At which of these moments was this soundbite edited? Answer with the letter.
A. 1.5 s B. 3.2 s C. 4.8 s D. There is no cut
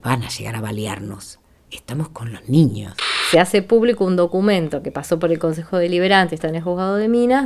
B